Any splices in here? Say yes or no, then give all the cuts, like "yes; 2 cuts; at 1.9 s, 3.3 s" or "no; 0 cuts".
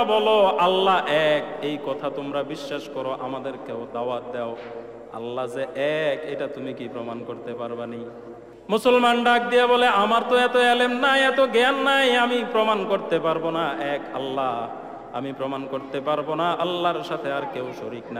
yes; 1 cut; at 8.5 s